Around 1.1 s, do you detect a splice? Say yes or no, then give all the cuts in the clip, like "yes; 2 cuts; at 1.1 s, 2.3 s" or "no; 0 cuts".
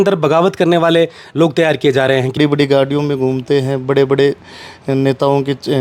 no; 1 cut; at 2.4 s